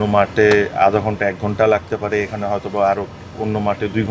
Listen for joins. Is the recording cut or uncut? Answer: uncut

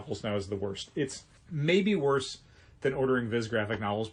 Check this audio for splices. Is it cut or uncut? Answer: uncut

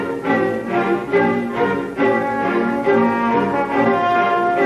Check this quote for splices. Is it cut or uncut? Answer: cut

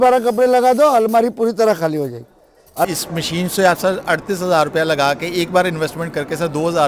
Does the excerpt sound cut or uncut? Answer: cut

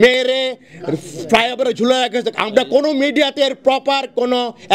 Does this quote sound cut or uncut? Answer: uncut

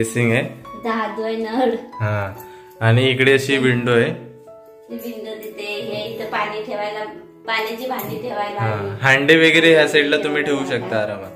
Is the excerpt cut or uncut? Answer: uncut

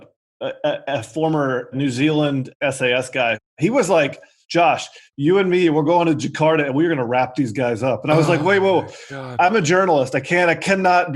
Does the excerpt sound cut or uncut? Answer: cut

